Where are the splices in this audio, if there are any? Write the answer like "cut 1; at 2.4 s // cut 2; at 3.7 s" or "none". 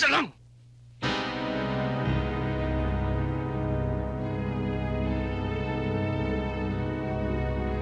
none